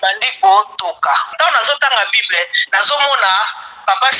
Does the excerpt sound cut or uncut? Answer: cut